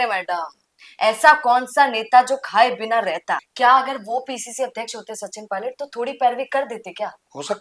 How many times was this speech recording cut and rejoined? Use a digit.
1